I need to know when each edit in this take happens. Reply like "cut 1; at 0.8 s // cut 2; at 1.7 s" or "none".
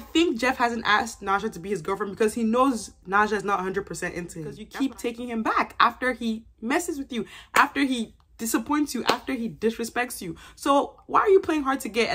cut 1; at 4.6 s

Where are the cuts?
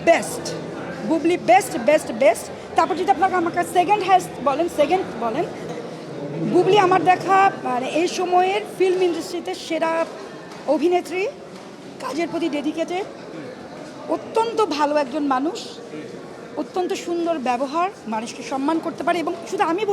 cut 1; at 5.6 s

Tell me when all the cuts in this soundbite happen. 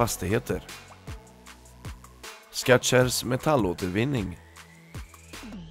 cut 1; at 4.4 s

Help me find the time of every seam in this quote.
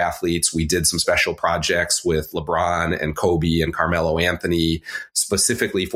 none

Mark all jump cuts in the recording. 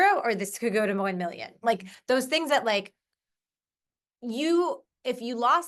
none

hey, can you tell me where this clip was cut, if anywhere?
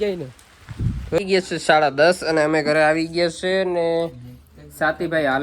cut 1; at 1.2 s

